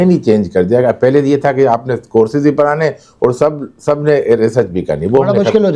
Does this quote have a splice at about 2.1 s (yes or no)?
no